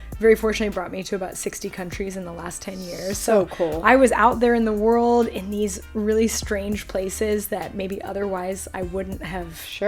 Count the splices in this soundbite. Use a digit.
0